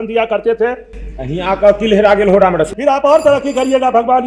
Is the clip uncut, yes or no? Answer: no